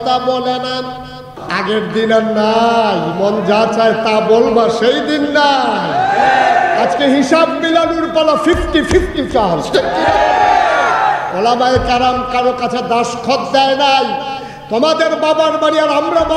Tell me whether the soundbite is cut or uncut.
cut